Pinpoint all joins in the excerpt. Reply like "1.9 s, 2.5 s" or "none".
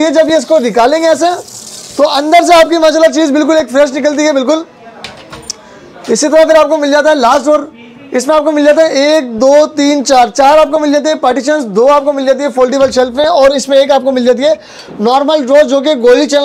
none

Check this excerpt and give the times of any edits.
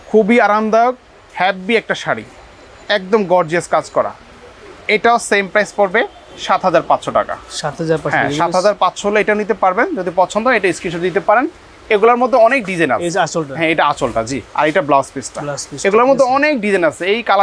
none

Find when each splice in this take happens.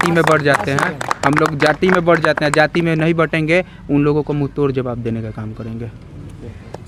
none

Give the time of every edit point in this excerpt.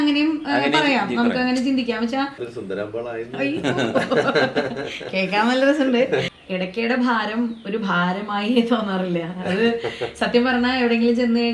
2.5 s, 6.3 s

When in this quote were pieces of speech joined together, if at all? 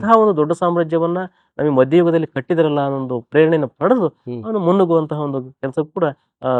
none

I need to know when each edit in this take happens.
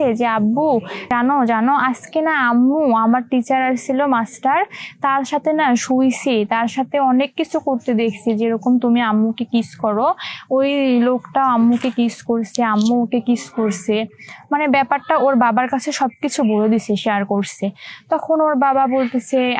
1.1 s

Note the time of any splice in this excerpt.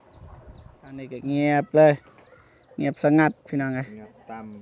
1.1 s

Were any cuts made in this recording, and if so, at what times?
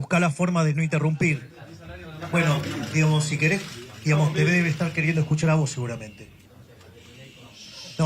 6.4 s

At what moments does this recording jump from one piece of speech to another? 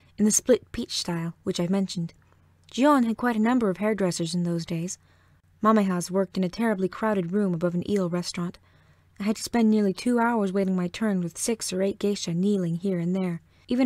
5.5 s

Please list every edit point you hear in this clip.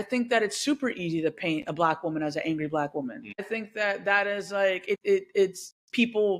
3.5 s, 5.0 s

